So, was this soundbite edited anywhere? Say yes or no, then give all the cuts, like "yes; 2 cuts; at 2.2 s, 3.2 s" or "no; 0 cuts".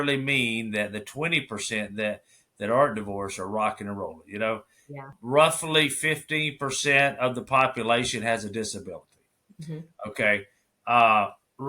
yes; 1 cut; at 5.1 s